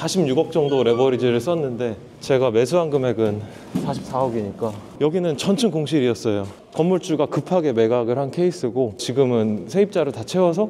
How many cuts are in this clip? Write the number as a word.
zero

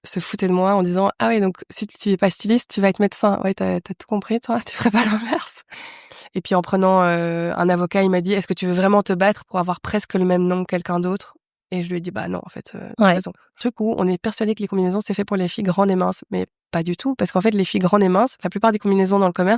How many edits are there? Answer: two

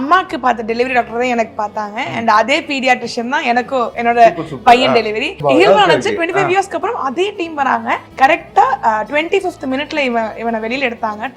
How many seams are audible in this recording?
two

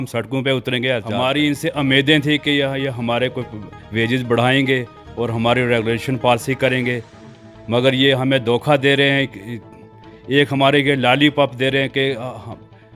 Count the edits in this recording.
one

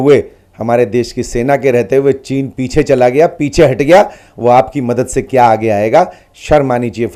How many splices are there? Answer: zero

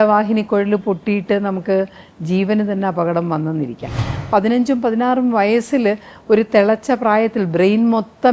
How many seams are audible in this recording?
one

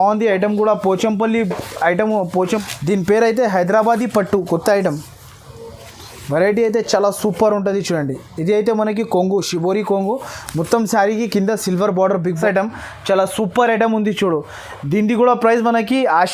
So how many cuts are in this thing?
two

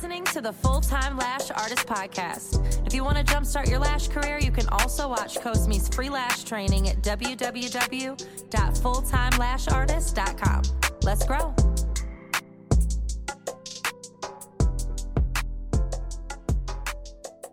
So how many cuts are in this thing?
zero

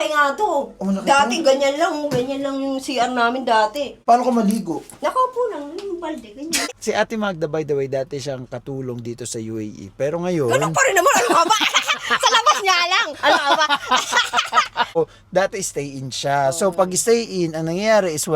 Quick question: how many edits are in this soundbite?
three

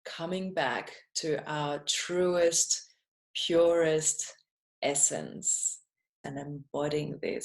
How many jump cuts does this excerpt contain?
one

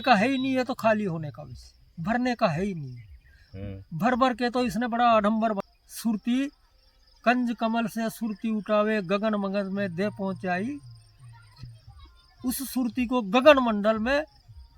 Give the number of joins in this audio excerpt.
one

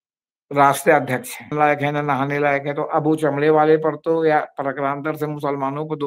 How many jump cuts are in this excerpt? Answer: one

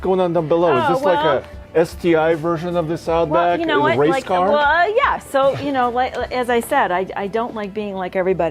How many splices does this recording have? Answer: zero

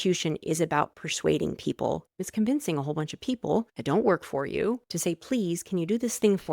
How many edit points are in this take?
three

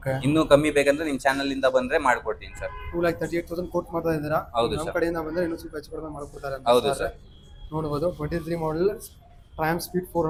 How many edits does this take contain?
zero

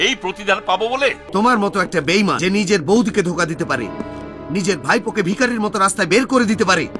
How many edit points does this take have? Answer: one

